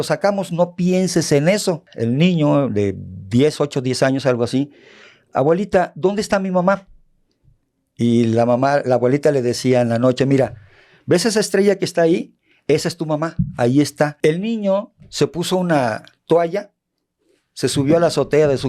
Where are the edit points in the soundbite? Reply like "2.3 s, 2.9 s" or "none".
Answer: 1.9 s, 14.1 s